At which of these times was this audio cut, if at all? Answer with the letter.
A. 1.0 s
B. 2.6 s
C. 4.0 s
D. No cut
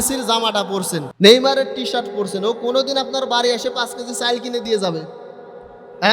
A